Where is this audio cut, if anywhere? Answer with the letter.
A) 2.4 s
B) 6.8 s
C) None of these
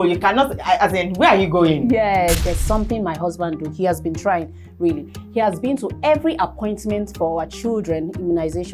A